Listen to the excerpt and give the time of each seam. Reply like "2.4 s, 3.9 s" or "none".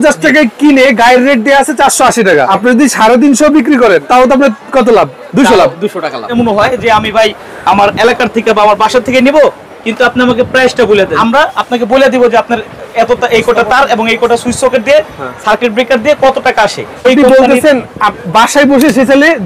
2.5 s, 4.1 s, 6.3 s, 11.1 s, 17.0 s